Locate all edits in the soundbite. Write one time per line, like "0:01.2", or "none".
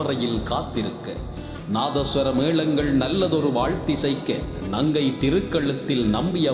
none